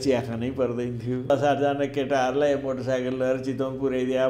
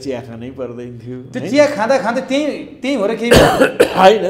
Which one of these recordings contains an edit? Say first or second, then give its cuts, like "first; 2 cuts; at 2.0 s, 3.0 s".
first; 1 cut; at 1.3 s